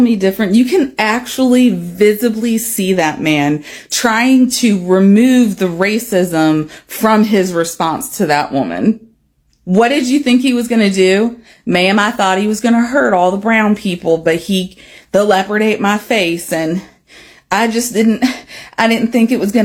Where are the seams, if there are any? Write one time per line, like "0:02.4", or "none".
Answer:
none